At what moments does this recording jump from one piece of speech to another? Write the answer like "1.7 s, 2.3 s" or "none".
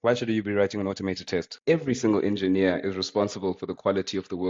1.6 s